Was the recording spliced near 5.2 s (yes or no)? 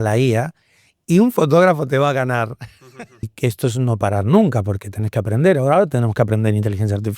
no